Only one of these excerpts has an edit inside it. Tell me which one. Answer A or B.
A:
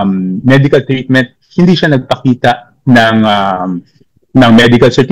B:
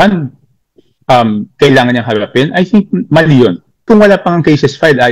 B